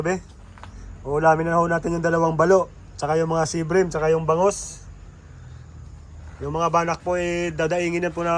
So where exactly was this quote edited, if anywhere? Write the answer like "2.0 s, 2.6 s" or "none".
none